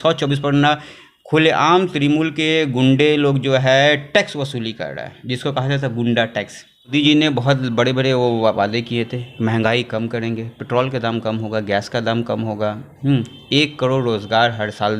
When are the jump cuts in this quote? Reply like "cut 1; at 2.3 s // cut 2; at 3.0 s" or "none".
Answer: cut 1; at 6.9 s